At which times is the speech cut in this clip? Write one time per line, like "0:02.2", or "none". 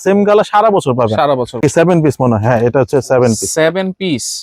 0:01.6